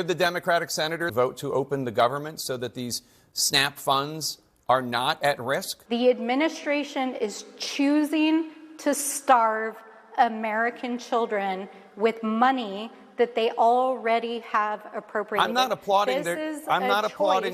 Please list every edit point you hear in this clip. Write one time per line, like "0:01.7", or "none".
0:01.1
0:05.7